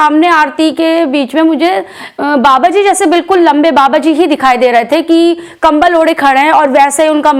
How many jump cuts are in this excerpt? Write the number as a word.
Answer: zero